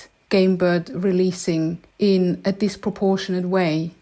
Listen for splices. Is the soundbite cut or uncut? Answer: cut